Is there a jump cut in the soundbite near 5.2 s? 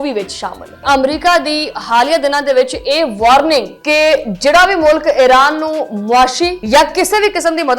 no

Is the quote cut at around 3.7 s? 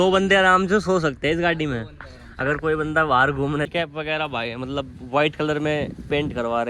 yes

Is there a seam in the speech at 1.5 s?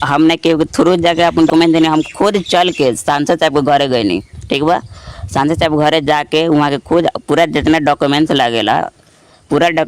yes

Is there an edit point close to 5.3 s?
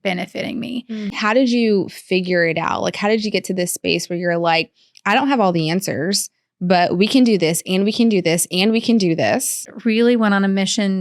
no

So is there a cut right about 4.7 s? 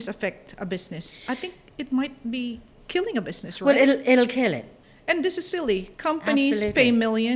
yes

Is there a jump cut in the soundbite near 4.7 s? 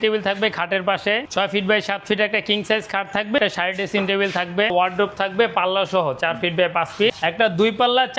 yes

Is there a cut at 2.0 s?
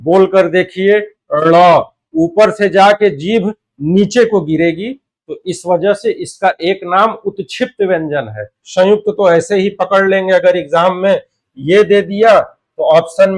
no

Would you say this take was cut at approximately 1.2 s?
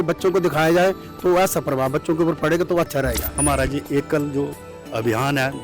no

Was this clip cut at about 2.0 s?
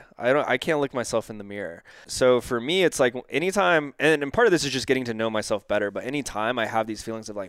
yes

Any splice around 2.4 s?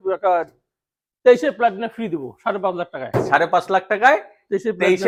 no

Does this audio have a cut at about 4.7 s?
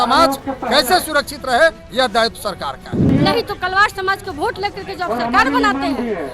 no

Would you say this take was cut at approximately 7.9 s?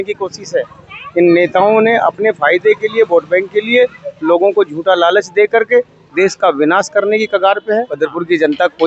yes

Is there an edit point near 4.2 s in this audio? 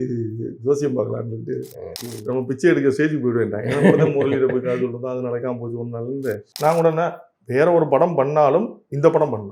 no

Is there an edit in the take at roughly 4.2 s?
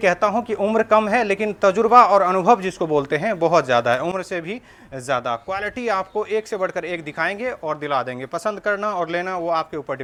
no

